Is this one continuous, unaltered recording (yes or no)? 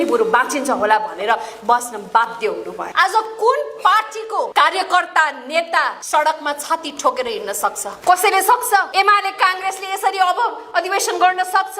no